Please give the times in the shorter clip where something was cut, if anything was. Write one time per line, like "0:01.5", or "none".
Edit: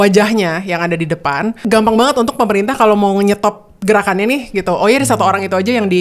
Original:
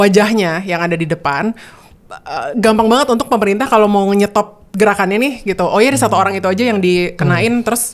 0:01.6